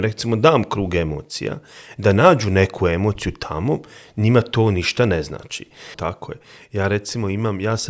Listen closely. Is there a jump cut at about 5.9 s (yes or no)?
yes